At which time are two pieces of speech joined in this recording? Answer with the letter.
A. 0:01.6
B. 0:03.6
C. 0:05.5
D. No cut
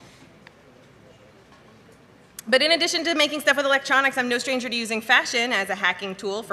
B